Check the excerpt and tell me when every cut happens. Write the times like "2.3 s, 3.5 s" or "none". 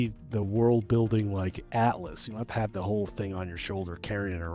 none